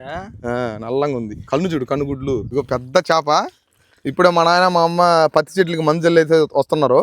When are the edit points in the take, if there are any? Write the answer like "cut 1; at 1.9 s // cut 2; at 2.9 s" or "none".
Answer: cut 1; at 2.5 s